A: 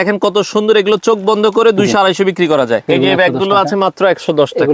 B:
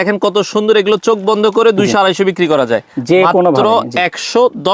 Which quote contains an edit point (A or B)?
A